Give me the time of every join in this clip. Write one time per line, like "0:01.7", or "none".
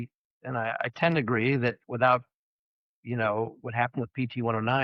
none